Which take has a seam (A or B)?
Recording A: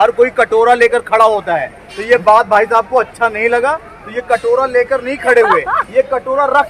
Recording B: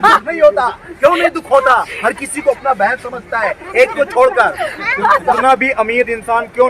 B